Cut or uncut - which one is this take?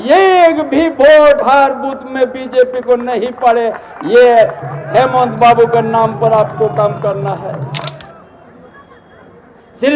cut